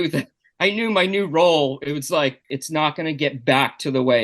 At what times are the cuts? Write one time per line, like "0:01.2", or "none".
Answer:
0:02.5